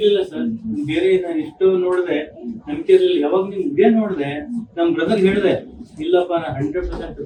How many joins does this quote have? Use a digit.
0